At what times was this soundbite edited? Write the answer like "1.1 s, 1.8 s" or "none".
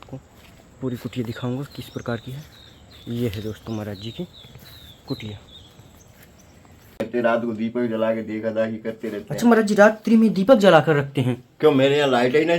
7.0 s